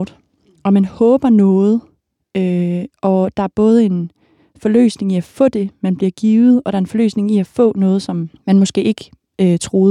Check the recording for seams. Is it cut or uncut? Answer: cut